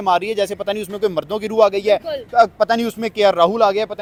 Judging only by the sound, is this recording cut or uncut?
uncut